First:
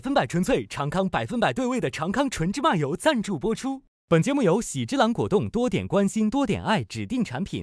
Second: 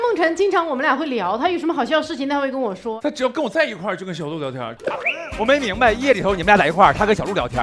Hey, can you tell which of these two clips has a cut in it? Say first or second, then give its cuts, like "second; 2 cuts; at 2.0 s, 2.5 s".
second; 2 cuts; at 3.0 s, 4.7 s